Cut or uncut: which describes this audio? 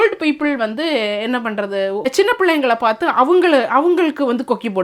cut